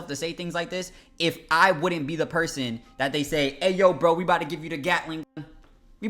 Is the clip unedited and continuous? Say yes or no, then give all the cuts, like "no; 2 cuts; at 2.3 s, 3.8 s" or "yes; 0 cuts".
yes; 0 cuts